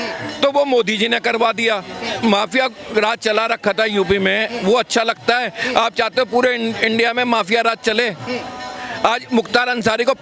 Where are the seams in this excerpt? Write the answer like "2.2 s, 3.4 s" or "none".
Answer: 2.1 s